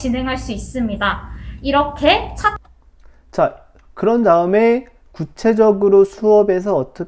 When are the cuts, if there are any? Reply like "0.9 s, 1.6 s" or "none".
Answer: none